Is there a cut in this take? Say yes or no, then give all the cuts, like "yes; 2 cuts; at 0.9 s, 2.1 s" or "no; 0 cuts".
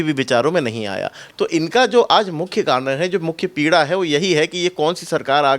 no; 0 cuts